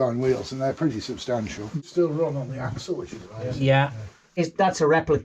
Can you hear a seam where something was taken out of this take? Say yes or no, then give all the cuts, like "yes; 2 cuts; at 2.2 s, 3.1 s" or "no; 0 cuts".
yes; 2 cuts; at 1.8 s, 4.3 s